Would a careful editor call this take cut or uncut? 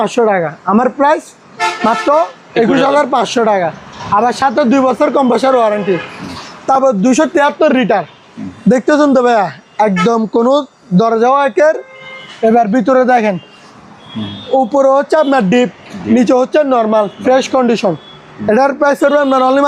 uncut